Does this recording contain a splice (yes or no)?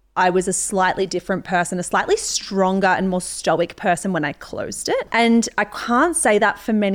yes